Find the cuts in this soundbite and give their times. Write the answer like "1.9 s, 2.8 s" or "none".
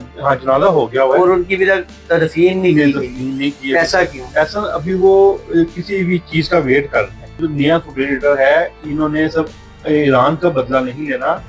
7.4 s